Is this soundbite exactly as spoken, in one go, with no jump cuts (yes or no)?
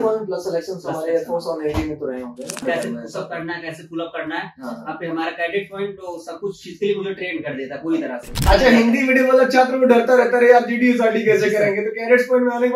no